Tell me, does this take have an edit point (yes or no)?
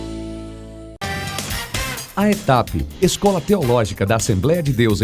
yes